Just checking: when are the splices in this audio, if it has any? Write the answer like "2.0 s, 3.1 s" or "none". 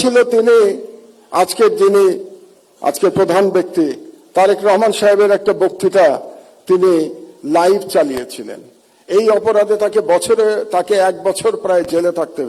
none